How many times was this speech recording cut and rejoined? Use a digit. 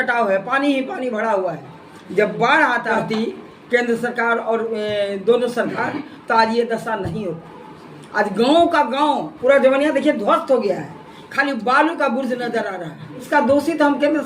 2